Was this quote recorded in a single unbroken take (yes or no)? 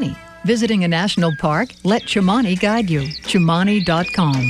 yes